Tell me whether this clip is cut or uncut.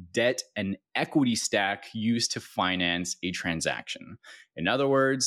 uncut